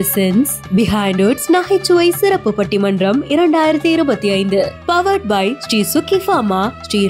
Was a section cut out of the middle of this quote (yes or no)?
no